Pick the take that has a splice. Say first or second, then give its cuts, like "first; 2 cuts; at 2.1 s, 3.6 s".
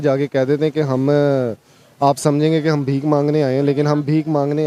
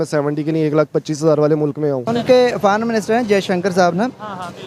second; 1 cut; at 2.0 s